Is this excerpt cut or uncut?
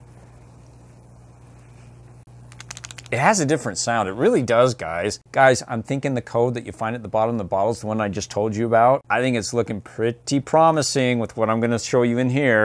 cut